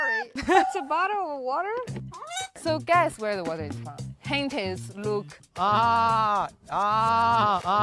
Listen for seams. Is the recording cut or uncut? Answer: uncut